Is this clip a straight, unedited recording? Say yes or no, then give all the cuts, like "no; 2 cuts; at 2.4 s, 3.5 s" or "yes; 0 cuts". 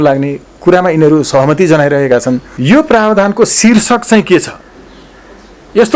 no; 1 cut; at 2.5 s